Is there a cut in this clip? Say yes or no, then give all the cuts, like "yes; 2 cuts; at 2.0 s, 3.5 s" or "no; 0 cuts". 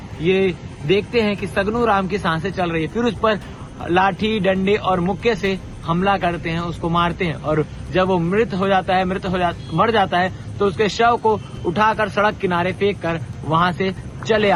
no; 0 cuts